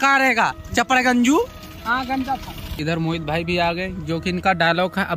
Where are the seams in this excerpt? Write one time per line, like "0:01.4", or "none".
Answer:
0:02.7